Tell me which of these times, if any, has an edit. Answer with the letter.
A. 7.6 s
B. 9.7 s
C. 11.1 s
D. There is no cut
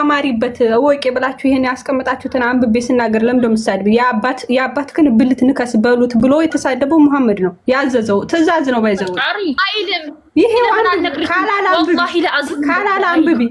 B